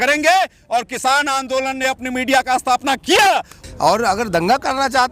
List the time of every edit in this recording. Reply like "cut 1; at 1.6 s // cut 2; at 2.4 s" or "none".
cut 1; at 3.5 s